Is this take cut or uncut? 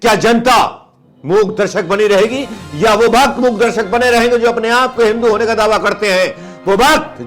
uncut